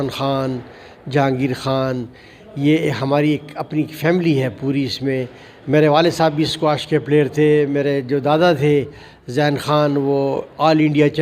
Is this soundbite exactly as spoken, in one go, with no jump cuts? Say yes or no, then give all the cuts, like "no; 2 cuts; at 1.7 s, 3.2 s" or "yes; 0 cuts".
yes; 0 cuts